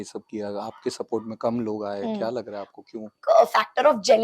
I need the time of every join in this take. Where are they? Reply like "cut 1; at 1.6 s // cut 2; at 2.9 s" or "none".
cut 1; at 3.2 s